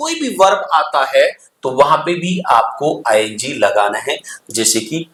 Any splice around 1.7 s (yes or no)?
no